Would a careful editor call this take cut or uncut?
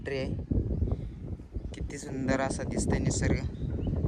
uncut